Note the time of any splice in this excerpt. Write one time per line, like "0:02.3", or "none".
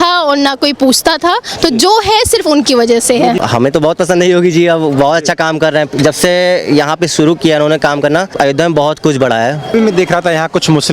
0:03.4
0:08.3
0:09.7